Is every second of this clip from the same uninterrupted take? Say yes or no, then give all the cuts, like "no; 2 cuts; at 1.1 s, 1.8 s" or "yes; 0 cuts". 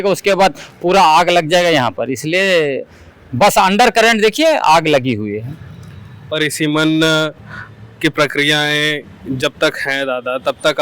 yes; 0 cuts